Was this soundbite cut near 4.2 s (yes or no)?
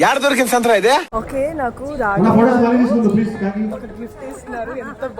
no